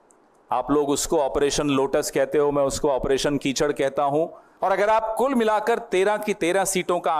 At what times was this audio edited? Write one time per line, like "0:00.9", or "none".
0:04.4